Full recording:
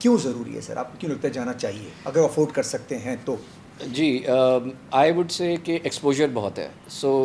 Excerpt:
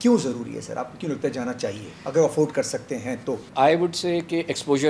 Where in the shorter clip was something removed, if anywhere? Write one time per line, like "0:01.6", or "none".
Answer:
0:03.4